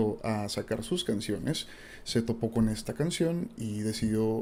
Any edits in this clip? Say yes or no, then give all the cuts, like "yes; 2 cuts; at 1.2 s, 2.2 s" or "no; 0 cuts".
no; 0 cuts